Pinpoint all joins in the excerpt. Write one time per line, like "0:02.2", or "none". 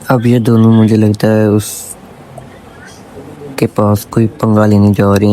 none